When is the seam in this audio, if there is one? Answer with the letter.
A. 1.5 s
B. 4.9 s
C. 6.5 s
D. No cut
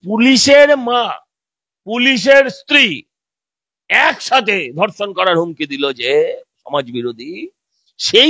D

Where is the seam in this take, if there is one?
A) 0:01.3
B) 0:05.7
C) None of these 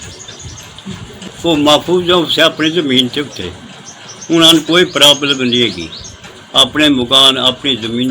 C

